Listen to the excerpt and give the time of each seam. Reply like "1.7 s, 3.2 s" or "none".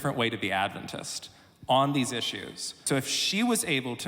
2.8 s

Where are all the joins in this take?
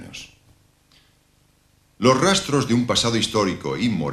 1.6 s

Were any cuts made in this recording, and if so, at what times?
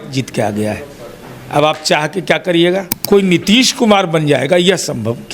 2.9 s

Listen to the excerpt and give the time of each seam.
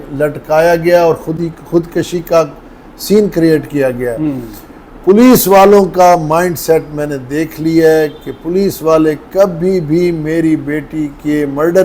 none

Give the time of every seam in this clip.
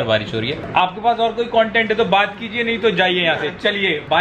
none

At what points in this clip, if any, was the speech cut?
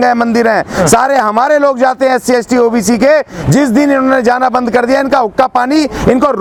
none

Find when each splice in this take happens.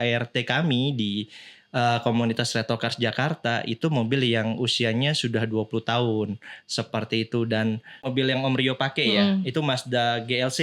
8.1 s

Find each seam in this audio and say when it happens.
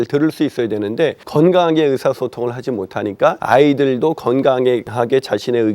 1.2 s, 3.4 s, 4.9 s

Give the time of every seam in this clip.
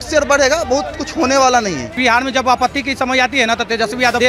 1.9 s

